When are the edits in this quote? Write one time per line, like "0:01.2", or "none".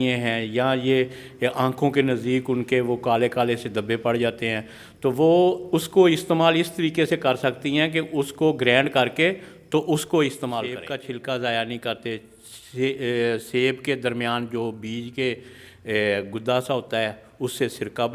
0:10.9